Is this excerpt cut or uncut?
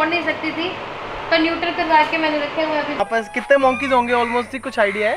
cut